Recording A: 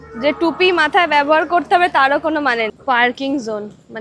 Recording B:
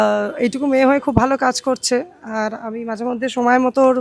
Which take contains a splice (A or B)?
A